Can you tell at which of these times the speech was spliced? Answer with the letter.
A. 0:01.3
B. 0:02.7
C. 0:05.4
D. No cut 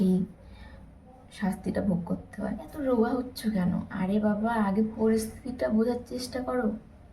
B